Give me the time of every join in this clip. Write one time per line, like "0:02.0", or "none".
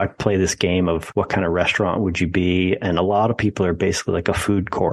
0:01.1